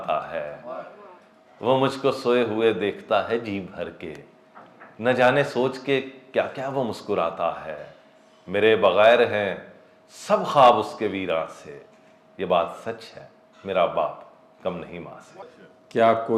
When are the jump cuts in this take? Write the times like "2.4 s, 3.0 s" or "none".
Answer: 15.4 s